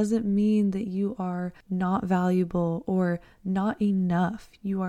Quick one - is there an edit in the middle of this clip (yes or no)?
yes